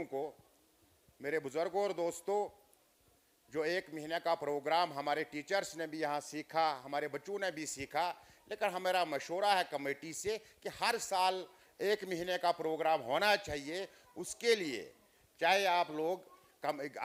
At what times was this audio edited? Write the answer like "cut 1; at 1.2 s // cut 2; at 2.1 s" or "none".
none